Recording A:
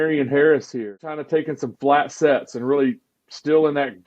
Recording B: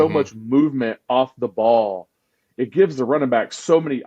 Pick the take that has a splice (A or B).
A